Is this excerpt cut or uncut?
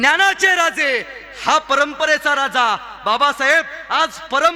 uncut